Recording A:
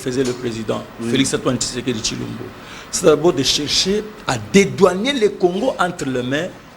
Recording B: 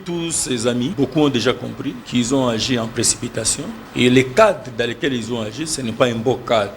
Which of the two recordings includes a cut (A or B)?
B